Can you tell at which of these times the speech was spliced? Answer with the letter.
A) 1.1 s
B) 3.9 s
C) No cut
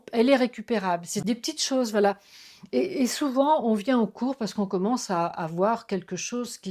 A